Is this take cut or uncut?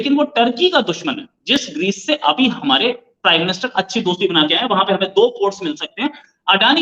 uncut